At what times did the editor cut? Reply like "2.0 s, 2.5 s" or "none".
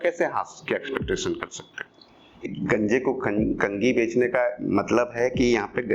2.4 s

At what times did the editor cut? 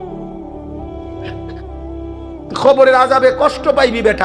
2.0 s

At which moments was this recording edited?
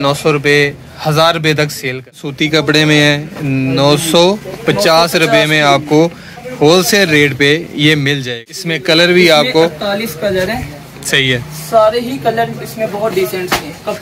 2.3 s, 8.6 s

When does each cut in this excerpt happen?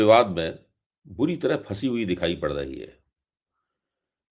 none

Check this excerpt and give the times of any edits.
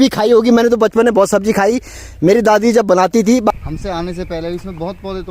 3.5 s

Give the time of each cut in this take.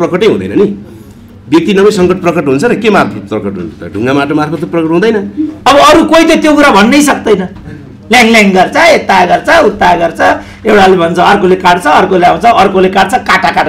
5.5 s

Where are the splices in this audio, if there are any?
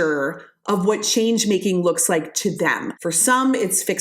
2.9 s

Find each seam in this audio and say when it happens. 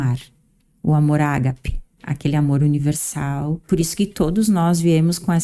2.0 s, 3.6 s

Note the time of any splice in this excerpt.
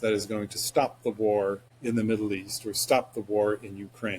1.7 s

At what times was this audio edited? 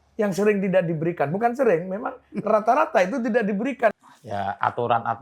4.0 s

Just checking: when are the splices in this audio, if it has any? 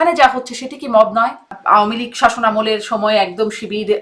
1.6 s

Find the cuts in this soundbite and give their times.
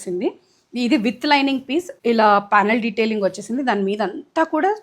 1.9 s

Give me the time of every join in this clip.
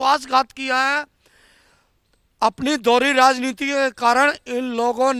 none

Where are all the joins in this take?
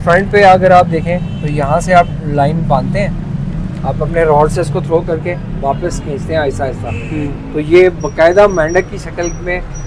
none

